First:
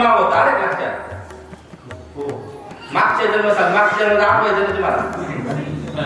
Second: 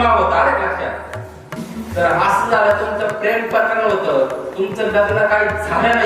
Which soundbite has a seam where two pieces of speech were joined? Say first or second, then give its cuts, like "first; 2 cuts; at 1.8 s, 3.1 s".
second; 1 cut; at 1.6 s